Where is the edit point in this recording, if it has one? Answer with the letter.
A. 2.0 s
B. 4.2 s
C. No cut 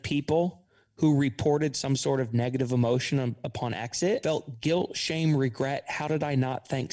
B